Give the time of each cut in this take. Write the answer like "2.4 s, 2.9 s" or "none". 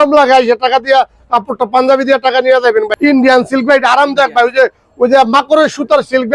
2.9 s